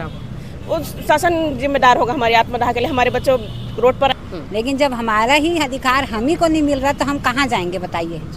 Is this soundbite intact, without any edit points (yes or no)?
no